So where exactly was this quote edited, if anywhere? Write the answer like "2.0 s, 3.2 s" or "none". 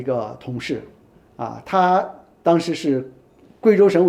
none